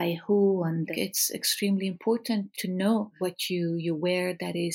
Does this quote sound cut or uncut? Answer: cut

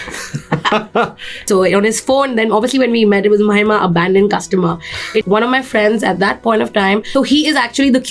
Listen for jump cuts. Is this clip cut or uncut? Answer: cut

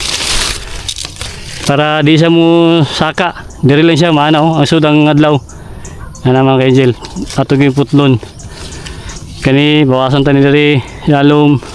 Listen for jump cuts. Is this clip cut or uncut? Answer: cut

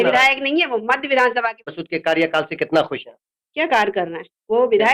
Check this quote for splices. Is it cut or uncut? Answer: cut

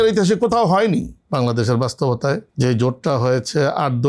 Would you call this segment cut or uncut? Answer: cut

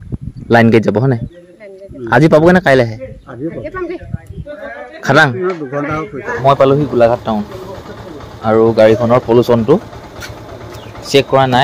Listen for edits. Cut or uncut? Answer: cut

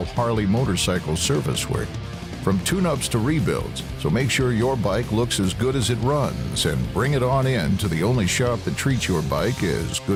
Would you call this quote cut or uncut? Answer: uncut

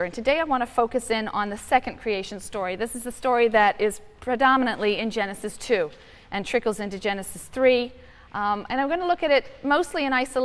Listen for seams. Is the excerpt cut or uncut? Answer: uncut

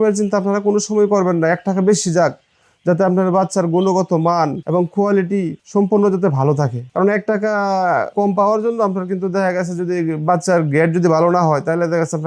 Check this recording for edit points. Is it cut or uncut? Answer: cut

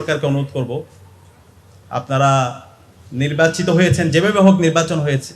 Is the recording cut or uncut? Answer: uncut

